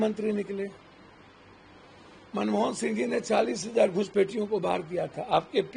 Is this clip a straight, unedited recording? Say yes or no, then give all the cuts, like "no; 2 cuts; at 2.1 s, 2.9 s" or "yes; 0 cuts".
yes; 0 cuts